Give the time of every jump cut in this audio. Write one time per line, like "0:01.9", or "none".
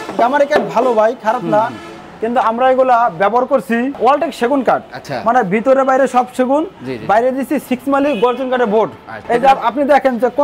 none

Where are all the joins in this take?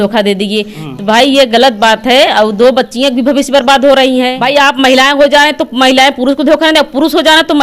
0:04.4

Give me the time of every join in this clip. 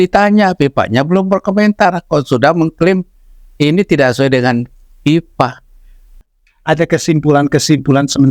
0:06.3

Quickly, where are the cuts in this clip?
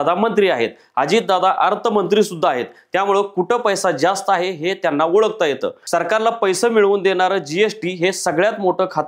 none

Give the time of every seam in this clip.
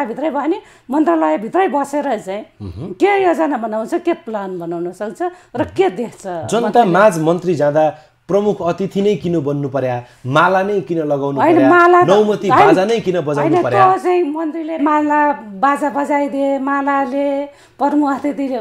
none

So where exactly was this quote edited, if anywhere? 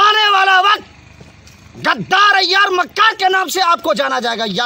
none

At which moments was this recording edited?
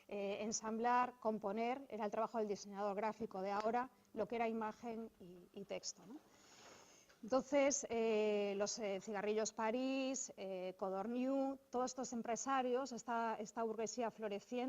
0:03.8

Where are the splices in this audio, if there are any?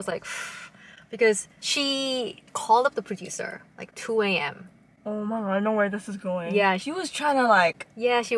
0:01.5
0:06.8

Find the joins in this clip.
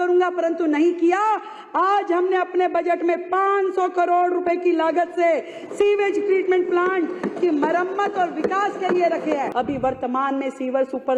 0:09.5

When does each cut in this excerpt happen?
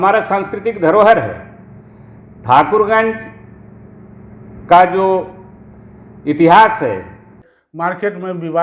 0:07.4

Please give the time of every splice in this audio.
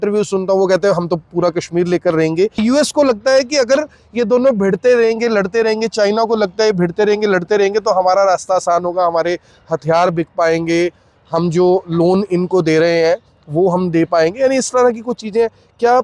0:02.6

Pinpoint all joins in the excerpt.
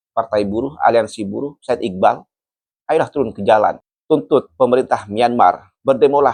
none

